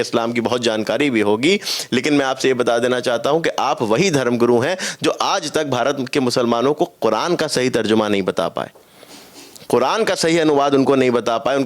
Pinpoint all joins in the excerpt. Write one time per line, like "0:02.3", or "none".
none